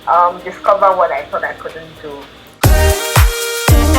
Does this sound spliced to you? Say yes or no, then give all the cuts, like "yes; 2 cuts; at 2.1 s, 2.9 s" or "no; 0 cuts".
yes; 1 cut; at 2.4 s